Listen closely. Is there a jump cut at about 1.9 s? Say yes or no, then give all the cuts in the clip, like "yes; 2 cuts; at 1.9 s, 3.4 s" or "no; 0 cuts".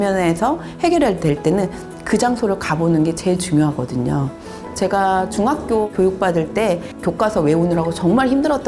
no; 2 cuts; at 4.6 s, 6.9 s